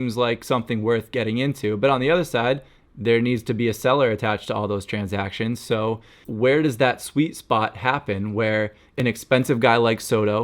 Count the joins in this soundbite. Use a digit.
2